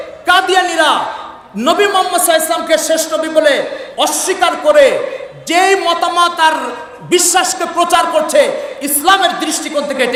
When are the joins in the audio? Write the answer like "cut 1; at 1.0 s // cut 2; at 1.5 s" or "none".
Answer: none